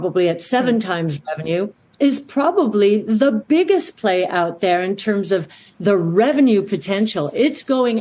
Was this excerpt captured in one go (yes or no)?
yes